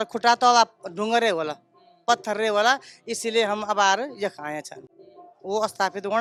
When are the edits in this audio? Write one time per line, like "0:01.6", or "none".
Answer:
none

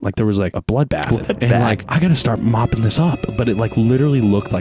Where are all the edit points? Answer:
0:00.9
0:01.8

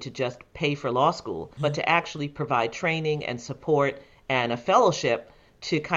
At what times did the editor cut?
0:01.5

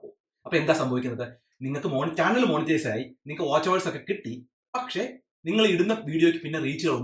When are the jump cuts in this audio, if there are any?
none

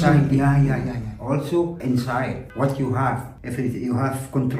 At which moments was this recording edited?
0:01.1
0:03.3

